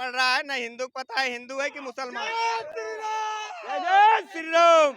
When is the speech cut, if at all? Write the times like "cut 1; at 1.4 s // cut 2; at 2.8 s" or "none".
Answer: none